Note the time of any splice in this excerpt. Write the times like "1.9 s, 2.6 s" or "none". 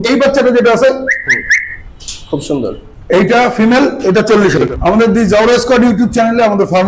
4.6 s